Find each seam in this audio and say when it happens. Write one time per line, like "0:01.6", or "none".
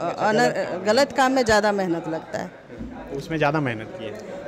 none